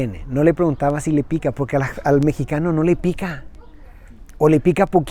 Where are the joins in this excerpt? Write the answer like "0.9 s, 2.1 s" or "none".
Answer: none